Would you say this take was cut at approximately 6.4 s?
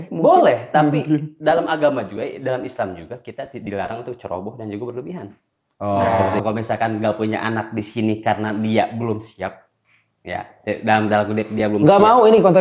yes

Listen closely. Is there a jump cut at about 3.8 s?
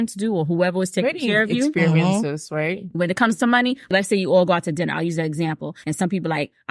yes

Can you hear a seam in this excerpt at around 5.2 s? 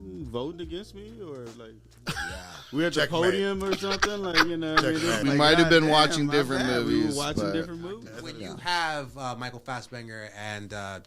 yes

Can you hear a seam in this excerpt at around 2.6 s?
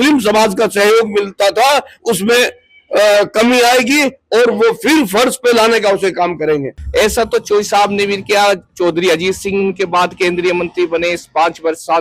no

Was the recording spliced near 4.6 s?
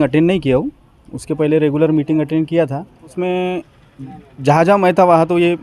no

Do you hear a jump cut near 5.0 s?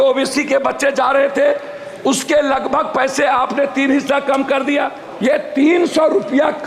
yes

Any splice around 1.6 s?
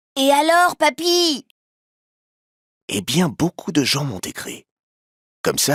no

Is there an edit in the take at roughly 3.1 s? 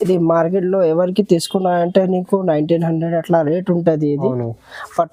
no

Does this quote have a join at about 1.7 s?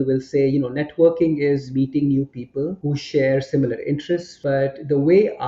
yes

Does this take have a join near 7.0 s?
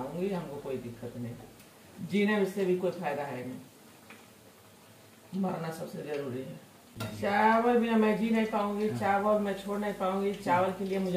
yes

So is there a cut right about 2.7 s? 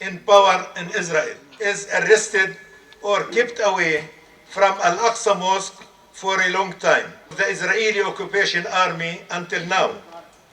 no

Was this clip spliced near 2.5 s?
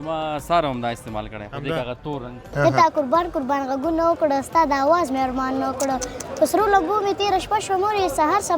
yes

